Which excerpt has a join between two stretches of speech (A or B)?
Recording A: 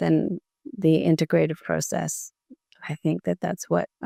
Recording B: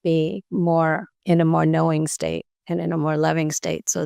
B